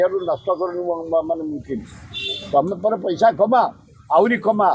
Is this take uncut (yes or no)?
yes